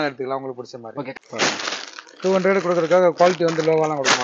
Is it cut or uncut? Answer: cut